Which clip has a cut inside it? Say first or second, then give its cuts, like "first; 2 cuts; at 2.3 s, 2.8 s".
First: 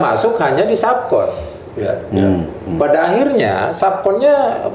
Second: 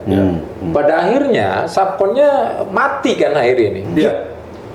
second; 1 cut; at 3.8 s